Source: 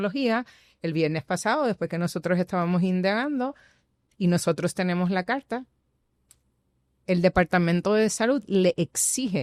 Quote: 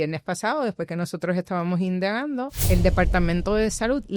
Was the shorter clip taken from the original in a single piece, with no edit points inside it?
no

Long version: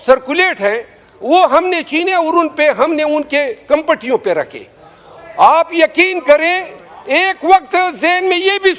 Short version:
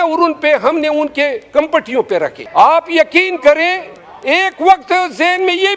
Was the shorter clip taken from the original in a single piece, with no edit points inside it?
no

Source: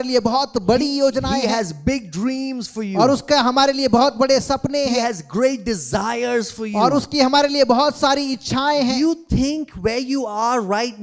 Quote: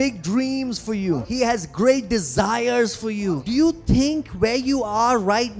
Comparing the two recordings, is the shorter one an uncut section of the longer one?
no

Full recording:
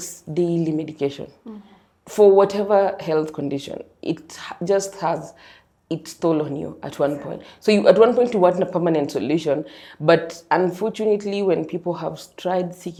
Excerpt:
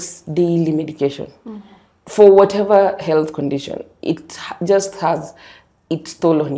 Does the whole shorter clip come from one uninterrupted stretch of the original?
yes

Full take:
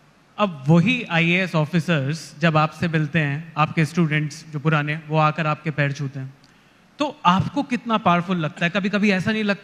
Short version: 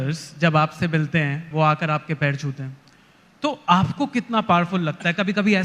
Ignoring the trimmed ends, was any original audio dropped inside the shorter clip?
yes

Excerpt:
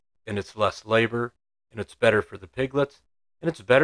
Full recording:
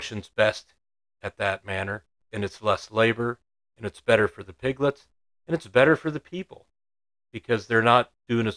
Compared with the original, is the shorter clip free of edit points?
yes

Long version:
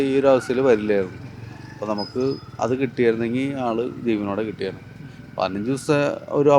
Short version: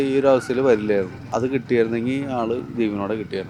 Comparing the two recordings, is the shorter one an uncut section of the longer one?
no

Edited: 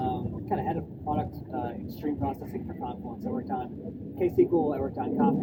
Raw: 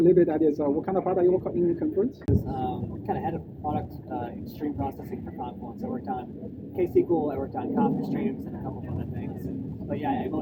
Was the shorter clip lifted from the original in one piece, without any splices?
yes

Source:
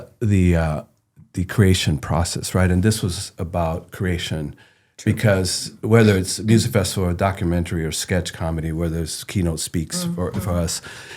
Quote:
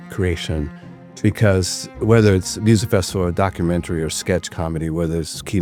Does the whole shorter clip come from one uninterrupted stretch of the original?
yes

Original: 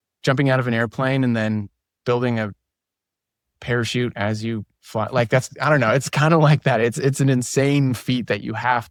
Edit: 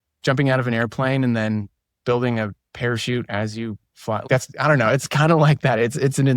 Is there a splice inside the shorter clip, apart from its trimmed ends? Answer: yes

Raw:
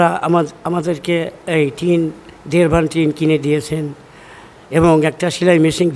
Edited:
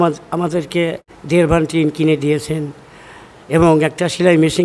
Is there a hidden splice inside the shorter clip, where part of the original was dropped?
yes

